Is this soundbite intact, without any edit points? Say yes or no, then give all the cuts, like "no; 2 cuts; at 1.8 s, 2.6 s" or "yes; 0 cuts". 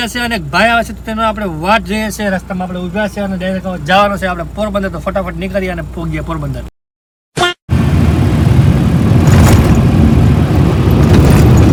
yes; 0 cuts